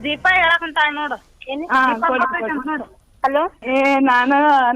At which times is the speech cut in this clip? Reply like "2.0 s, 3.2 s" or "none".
3.6 s